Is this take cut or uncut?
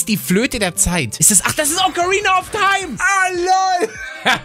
uncut